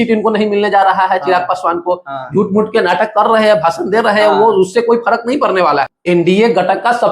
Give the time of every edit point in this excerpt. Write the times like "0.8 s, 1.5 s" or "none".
5.9 s